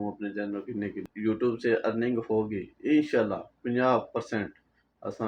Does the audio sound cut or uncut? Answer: cut